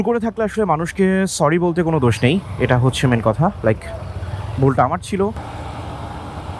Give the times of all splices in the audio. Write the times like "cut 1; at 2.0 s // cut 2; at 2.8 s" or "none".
cut 1; at 5.4 s